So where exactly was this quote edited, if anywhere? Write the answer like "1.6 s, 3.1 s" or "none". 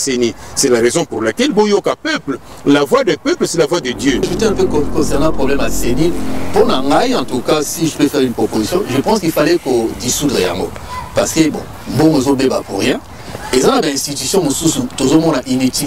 4.3 s